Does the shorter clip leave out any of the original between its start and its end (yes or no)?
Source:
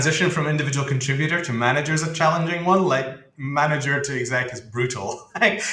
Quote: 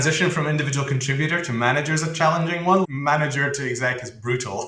yes